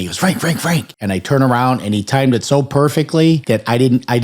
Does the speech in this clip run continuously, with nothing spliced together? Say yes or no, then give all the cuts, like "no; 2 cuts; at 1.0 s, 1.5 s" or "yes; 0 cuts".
no; 2 cuts; at 0.9 s, 3.4 s